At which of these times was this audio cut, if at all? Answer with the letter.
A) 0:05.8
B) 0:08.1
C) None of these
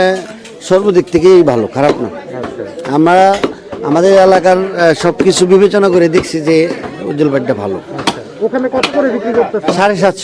C